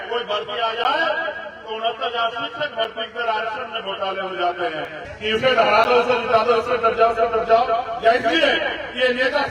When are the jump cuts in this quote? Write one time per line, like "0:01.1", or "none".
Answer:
0:05.0